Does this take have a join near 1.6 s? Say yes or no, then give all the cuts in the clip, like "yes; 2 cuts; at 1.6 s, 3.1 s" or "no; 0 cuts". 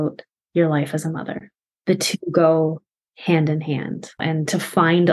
yes; 2 cuts; at 1.6 s, 4.2 s